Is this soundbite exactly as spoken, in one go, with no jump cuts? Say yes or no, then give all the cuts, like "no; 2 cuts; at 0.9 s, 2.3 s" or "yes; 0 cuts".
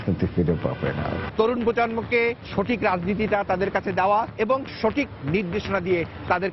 no; 2 cuts; at 1.2 s, 4.3 s